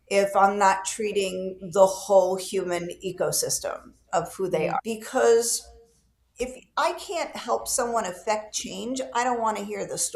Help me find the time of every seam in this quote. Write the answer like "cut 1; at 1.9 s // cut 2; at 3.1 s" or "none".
cut 1; at 4.8 s